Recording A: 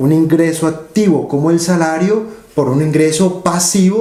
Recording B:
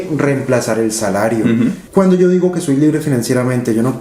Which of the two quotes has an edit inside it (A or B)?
B